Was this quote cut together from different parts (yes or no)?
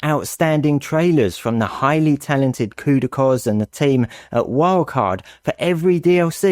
no